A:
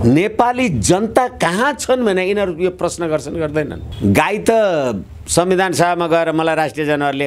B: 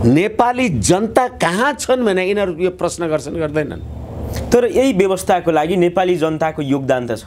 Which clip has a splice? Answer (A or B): A